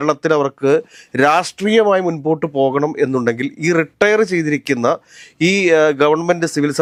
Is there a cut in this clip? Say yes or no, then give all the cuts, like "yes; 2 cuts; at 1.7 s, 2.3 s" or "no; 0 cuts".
no; 0 cuts